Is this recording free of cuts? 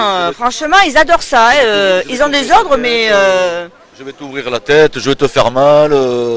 yes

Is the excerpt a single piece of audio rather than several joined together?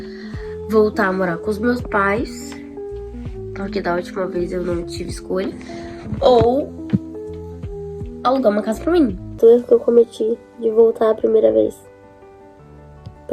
no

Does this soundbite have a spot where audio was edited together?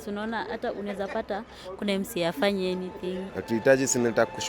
yes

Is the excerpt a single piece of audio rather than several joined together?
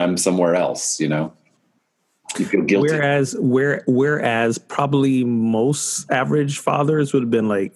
yes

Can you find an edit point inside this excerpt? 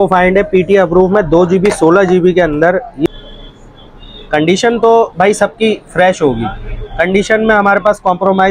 yes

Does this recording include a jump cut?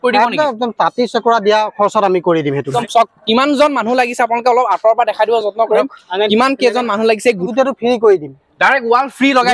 yes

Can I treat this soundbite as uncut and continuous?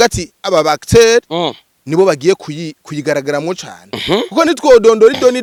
yes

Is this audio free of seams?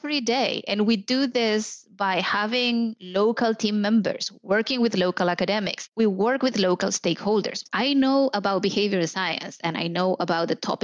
no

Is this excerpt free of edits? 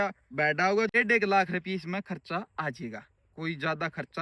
no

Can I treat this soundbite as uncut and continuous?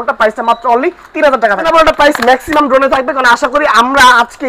no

